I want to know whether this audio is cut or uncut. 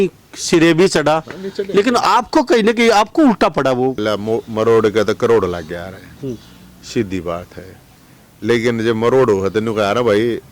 cut